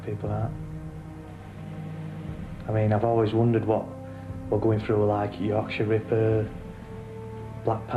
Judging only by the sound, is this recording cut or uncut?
uncut